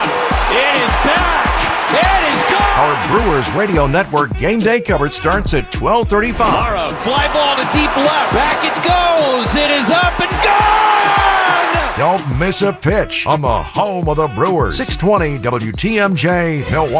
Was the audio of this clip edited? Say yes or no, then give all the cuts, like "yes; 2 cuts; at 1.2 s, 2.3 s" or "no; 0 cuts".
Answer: no; 0 cuts